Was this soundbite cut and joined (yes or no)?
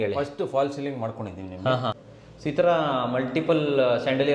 yes